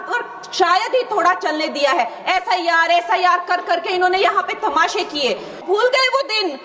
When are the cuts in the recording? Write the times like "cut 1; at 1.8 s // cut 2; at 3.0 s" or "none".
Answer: cut 1; at 5.6 s